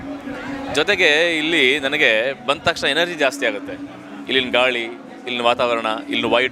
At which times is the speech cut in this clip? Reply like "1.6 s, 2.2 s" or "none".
none